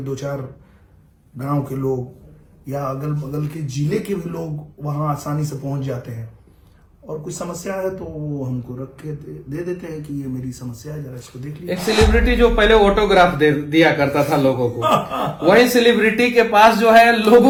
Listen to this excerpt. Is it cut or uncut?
uncut